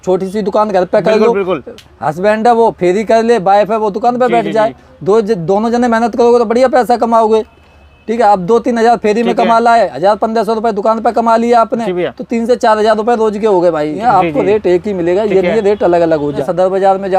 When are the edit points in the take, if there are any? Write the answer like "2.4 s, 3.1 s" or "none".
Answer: 14.0 s, 16.4 s